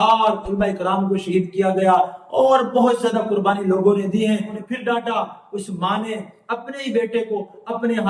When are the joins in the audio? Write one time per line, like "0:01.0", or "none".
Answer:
0:04.6

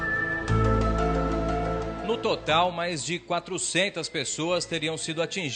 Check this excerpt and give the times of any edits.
0:02.0

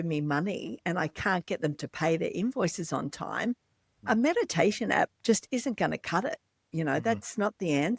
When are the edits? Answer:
none

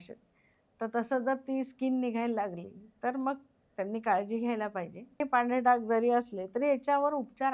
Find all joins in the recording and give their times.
0:05.2

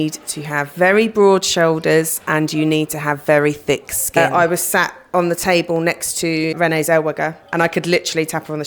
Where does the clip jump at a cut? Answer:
0:04.2
0:06.5

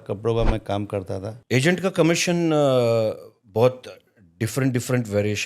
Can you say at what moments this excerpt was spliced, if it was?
0:01.3

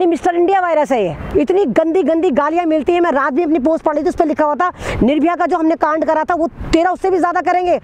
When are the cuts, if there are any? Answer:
0:01.2

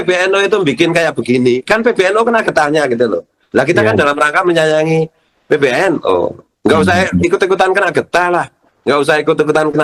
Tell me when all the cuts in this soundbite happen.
none

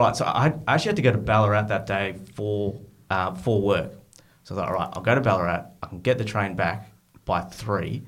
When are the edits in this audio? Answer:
none

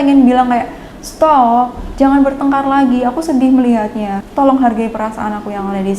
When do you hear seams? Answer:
0:04.2

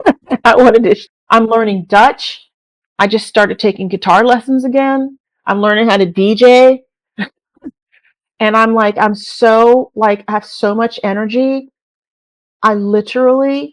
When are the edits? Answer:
0:01.1

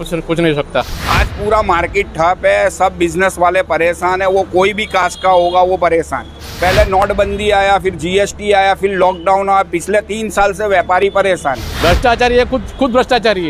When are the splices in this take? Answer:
none

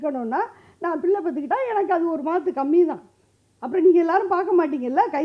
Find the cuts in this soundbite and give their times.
none

